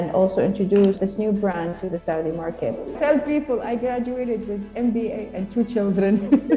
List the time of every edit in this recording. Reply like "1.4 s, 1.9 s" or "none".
1.0 s, 3.0 s